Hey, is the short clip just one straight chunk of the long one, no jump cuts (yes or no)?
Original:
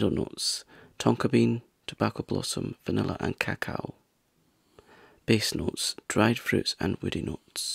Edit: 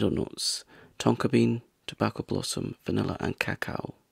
yes